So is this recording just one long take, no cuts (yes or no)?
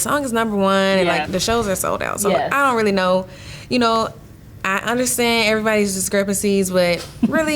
no